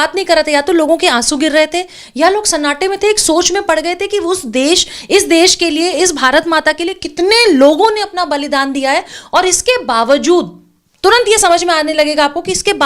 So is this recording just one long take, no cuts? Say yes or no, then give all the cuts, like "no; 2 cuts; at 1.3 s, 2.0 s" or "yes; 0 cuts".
yes; 0 cuts